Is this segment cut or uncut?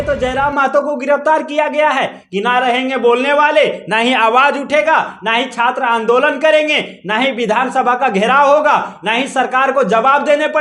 uncut